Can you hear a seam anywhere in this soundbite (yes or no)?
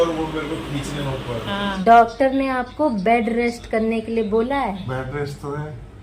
yes